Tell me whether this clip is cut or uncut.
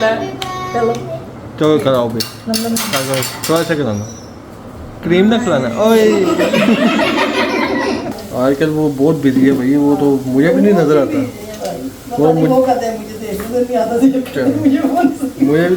cut